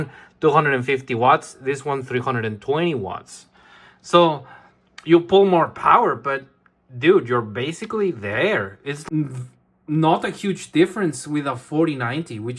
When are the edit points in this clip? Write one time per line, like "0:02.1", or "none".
0:08.9